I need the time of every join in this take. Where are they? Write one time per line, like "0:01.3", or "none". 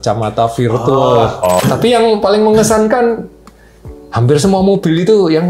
0:01.6